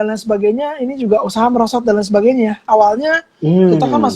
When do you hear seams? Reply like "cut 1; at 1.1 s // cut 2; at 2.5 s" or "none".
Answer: none